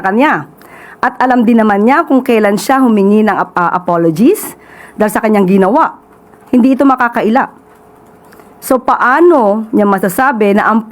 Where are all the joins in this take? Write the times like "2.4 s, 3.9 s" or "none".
none